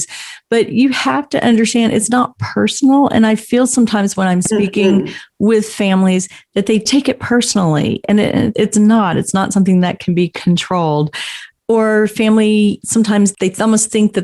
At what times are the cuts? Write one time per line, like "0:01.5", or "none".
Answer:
none

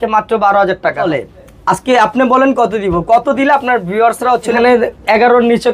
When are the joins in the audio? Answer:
0:01.0
0:04.5

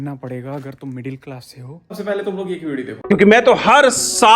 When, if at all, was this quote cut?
0:02.0

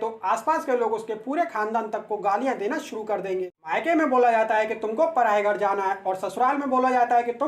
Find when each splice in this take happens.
0:03.6

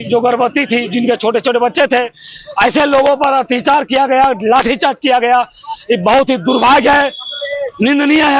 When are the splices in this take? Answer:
none

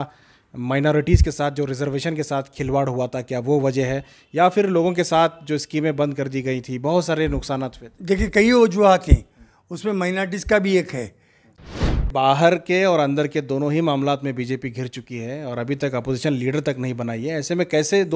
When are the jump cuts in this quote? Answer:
0:11.6

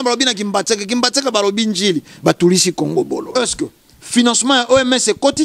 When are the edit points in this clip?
0:03.3

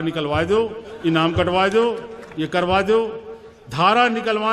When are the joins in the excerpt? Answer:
none

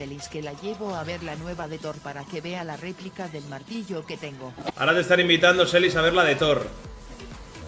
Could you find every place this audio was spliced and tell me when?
0:04.7

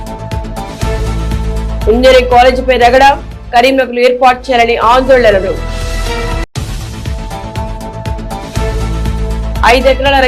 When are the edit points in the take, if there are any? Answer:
0:01.4

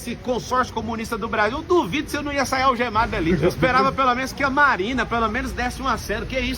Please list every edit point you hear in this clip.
0:03.3

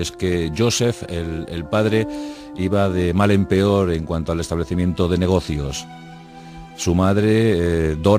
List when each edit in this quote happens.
0:05.8

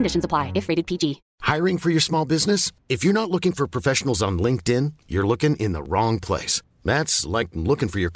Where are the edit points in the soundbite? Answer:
0:01.3

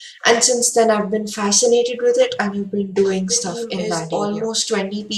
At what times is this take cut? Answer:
0:03.9

